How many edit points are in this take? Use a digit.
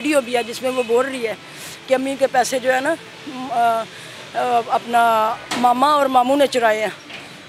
0